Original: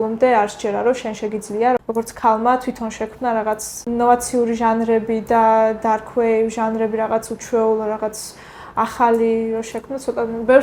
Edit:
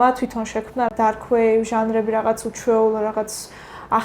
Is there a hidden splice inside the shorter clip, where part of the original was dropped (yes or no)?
yes